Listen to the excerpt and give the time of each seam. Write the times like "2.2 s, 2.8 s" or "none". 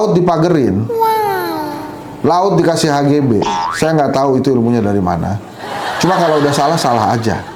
none